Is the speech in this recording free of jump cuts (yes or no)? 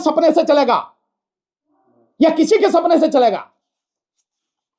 yes